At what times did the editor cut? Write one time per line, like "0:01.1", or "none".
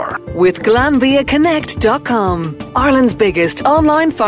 0:02.5